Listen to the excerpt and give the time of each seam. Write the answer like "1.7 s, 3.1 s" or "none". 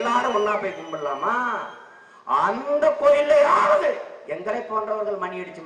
none